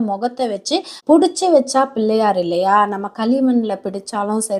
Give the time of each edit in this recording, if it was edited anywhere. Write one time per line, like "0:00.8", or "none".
0:00.9